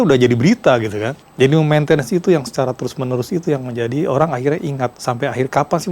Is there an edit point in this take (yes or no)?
yes